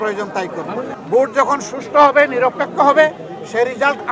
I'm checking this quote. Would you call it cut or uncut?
cut